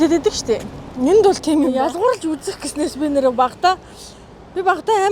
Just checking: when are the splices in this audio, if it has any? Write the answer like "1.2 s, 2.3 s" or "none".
1.7 s